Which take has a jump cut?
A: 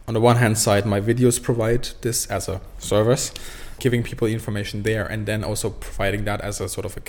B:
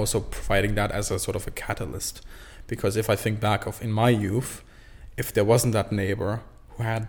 A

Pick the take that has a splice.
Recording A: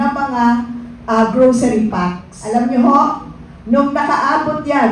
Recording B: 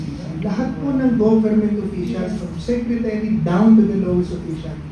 A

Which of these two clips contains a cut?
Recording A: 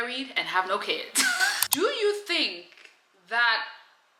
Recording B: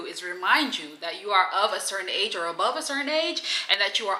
A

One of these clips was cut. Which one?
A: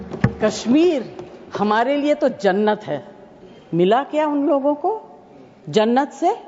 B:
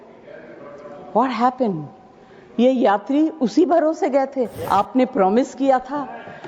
B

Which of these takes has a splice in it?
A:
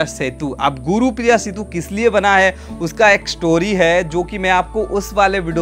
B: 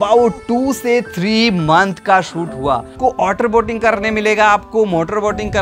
B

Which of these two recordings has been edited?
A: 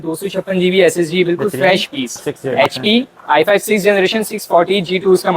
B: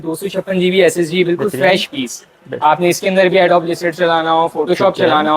A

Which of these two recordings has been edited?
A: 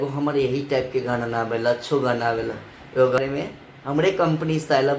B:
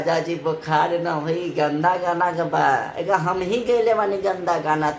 A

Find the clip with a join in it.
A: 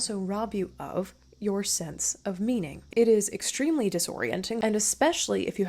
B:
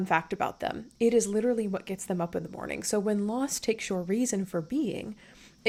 A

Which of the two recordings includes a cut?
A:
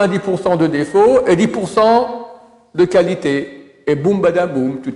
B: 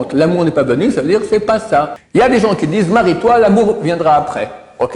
B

